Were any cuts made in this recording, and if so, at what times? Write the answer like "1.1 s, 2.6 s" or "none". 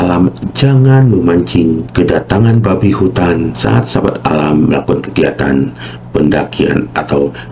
1.9 s, 3.6 s